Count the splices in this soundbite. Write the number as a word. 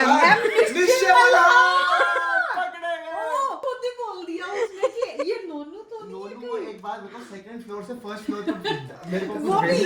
one